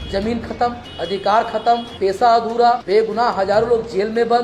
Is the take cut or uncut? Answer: cut